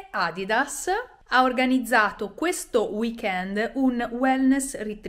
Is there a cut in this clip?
yes; 1 cut; at 1.2 s

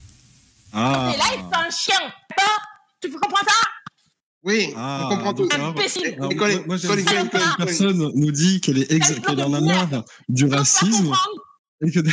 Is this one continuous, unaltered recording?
yes; 0 cuts

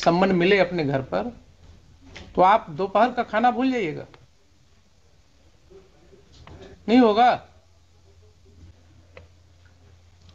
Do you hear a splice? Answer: yes; 1 cut; at 8.7 s

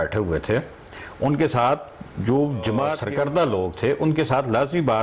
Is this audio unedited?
no; 1 cut; at 3.0 s

